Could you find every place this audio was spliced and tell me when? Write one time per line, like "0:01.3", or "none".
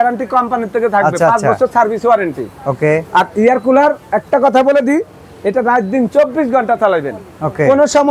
none